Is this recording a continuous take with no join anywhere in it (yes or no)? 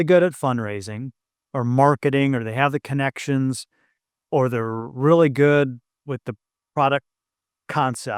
yes